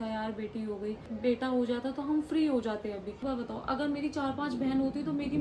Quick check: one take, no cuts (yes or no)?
no